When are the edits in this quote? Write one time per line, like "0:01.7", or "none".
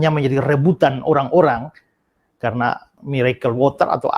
0:02.9